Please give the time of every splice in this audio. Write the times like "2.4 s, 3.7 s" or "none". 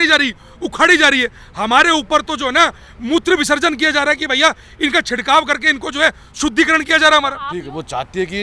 7.4 s